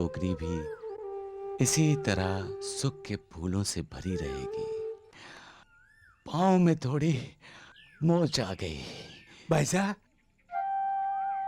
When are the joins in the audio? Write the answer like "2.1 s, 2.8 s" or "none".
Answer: 5.1 s

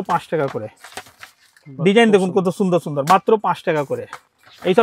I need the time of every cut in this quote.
none

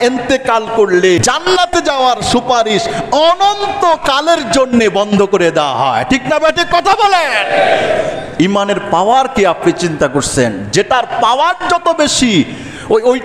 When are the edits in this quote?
1.2 s

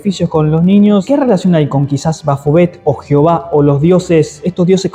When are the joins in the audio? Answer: 1.0 s

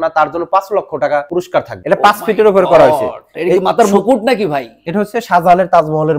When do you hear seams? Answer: 1.7 s

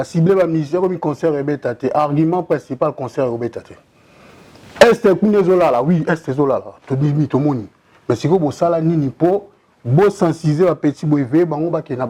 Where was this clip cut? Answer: none

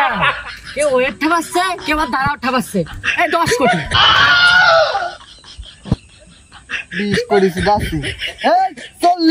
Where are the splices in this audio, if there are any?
3.9 s

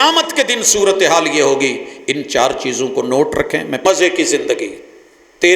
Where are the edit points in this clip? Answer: 3.8 s

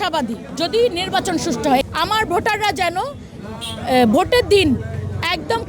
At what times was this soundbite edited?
1.8 s

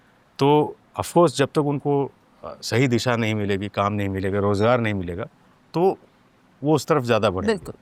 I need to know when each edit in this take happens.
none

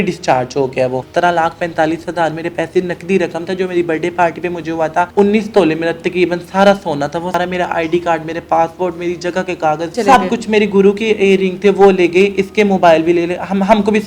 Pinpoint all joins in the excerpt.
1.0 s, 5.1 s, 7.4 s, 10.0 s

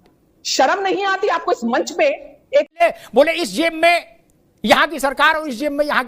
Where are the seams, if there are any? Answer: 2.8 s

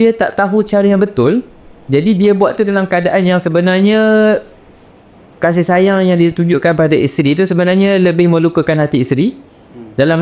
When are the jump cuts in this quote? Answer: none

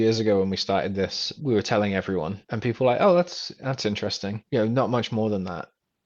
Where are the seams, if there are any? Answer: 1.3 s, 2.4 s, 4.4 s

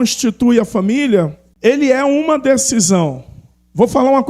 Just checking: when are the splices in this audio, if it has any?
1.4 s

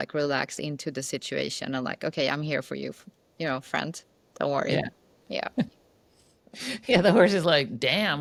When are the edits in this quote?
none

